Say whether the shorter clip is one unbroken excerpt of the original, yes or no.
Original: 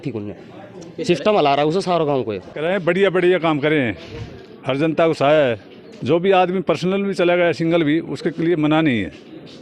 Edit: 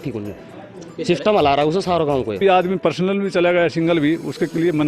no